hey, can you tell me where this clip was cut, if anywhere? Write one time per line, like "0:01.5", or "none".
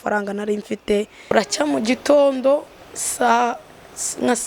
0:01.3